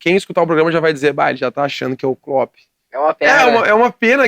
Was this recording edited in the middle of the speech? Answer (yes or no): no